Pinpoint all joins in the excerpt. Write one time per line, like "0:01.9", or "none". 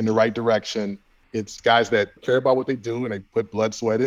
0:01.4
0:02.2